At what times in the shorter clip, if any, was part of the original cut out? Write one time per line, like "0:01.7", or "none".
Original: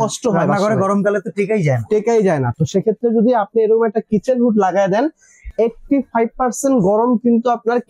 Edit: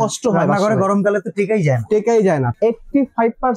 0:02.5